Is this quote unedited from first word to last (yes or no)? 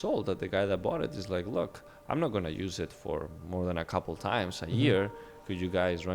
yes